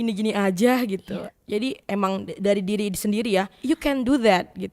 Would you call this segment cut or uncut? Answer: cut